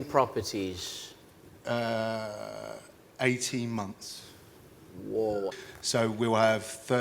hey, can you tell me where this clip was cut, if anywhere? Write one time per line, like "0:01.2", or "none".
0:05.5